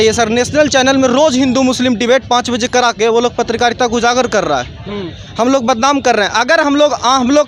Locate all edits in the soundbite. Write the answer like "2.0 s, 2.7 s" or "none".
none